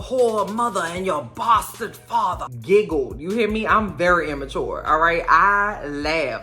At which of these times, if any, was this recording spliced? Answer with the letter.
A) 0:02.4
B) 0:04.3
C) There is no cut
A